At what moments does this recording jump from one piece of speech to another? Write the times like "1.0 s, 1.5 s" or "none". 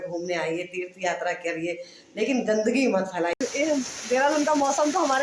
3.4 s